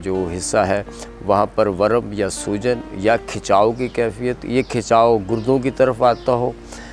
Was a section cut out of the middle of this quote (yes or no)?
no